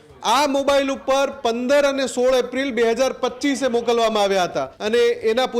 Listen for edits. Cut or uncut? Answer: cut